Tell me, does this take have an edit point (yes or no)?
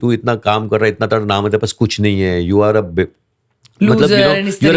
no